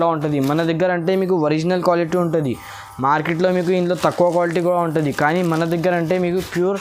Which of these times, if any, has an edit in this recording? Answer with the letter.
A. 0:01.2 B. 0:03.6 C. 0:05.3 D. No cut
D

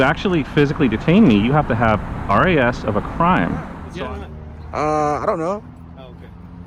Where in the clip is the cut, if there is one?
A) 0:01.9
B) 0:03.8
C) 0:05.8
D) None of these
B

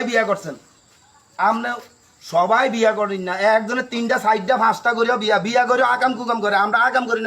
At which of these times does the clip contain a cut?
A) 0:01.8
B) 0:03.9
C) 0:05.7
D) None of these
D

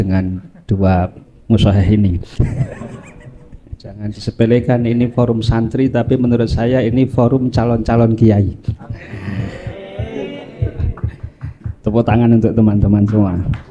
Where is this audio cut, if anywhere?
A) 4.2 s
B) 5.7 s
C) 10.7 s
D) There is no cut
A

